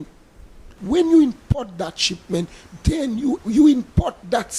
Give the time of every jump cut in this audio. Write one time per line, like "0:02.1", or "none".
0:00.8
0:03.4